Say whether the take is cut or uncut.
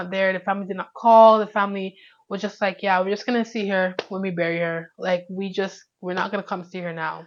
uncut